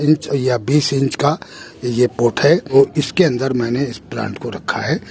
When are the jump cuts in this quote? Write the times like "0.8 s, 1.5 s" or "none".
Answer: 2.7 s